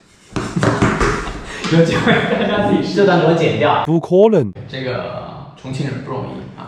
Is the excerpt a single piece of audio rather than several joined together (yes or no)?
yes